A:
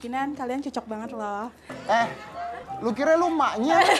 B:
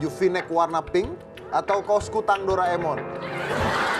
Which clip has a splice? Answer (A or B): A